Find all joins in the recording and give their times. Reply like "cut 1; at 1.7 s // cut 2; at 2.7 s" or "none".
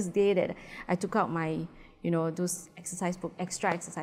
none